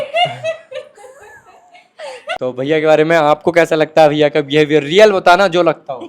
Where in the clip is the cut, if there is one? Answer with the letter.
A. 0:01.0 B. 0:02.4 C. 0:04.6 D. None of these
B